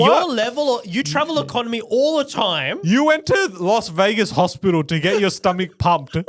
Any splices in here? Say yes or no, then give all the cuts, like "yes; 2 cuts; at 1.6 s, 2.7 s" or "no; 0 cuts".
no; 0 cuts